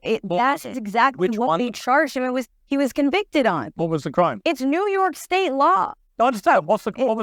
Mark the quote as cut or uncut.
cut